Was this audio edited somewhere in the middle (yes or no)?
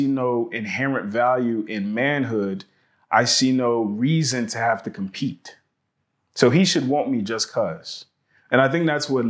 no